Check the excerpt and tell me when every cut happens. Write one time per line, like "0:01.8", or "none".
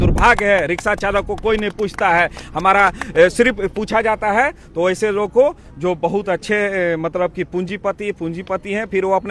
none